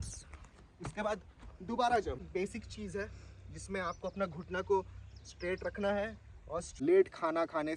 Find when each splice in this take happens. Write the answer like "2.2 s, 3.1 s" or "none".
2.3 s, 6.7 s